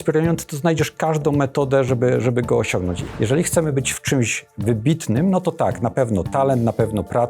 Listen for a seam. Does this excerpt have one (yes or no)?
yes